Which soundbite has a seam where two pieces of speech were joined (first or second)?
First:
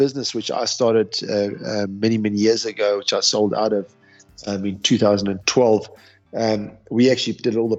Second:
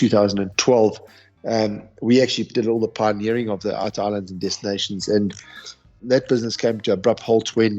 second